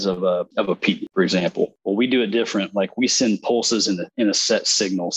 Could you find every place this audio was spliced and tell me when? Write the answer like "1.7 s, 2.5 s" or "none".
0.9 s, 1.8 s